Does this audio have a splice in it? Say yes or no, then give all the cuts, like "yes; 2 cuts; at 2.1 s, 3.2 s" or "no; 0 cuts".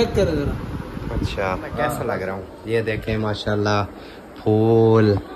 yes; 1 cut; at 2.0 s